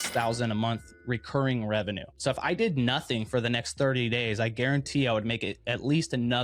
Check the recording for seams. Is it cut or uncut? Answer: cut